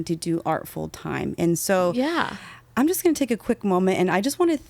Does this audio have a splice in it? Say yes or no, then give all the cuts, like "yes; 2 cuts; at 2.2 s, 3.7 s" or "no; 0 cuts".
no; 0 cuts